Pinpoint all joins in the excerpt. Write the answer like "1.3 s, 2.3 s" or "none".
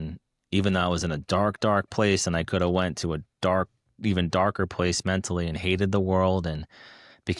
none